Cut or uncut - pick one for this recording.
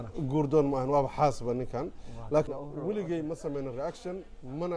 cut